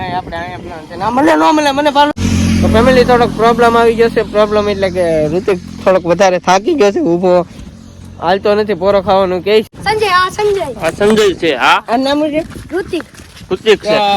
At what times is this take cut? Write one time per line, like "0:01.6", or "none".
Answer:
0:02.1
0:09.7